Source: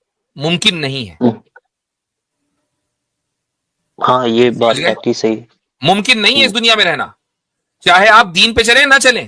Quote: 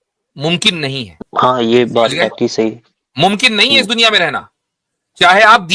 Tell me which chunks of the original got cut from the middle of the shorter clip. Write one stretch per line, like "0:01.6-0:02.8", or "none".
0:01.1-0:03.8

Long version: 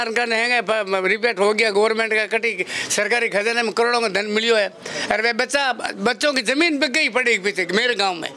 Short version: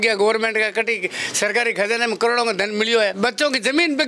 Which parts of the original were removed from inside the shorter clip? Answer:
0:04.7-0:06.0

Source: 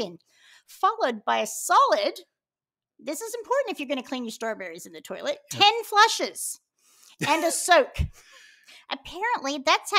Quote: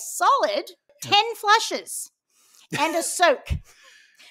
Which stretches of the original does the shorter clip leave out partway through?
0:02.5-0:05.5

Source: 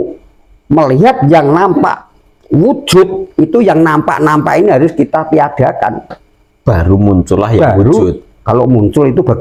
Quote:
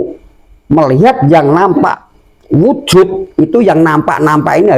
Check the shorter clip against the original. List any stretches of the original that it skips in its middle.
none

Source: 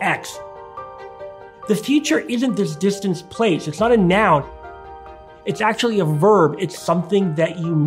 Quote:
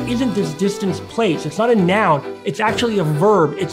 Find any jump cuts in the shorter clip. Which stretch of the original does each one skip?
0:04.6-0:05.4

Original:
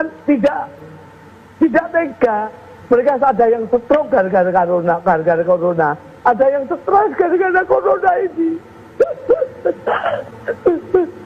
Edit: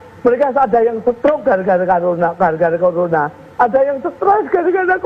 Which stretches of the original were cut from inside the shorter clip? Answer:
none

